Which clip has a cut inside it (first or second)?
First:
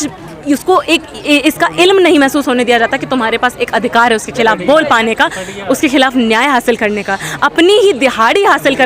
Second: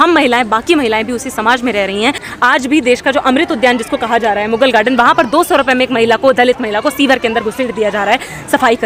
second